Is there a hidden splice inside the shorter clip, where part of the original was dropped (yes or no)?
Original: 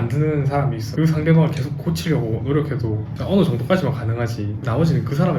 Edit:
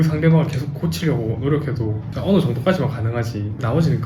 no